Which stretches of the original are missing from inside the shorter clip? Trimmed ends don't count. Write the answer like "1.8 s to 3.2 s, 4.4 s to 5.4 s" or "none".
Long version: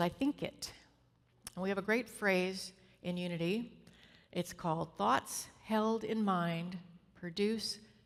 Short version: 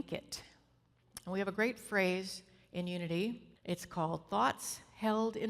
3.8 s to 4.2 s